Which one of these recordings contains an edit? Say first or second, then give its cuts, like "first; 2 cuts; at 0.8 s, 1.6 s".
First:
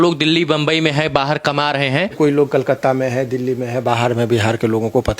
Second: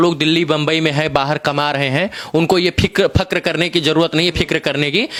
first; 1 cut; at 2.2 s